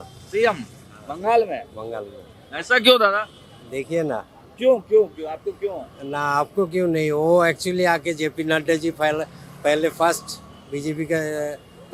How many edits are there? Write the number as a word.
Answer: zero